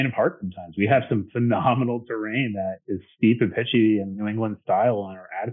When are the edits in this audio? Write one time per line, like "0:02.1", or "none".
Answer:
none